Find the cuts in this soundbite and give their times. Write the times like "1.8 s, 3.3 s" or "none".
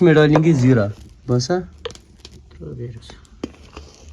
1.1 s